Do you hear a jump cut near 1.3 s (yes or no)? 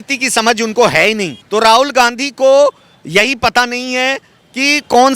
yes